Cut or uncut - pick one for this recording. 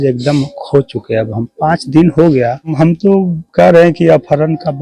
cut